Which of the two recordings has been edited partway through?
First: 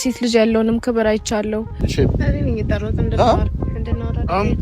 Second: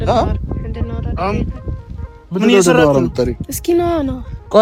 first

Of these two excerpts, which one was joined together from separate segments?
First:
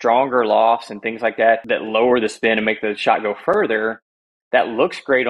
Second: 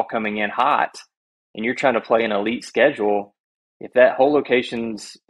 first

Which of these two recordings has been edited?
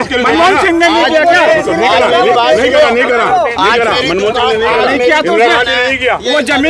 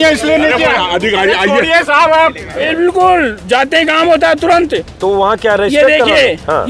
second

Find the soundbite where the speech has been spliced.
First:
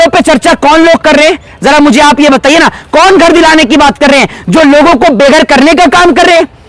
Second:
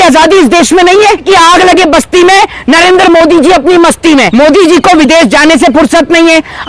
second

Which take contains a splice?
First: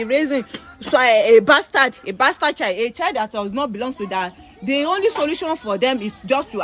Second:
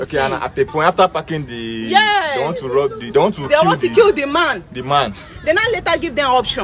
second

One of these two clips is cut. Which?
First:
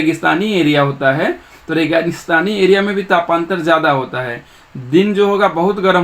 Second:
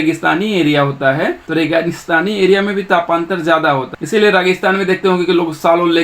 second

